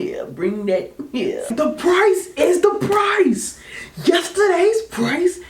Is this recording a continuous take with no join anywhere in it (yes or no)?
no